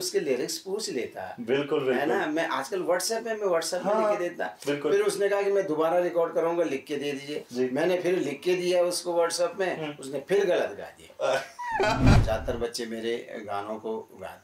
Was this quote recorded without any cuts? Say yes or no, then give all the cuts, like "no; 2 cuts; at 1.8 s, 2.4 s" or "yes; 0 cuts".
no; 1 cut; at 12.2 s